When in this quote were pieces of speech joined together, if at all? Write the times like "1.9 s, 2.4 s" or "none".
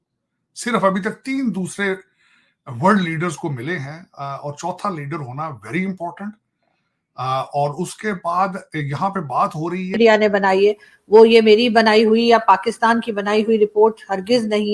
10.0 s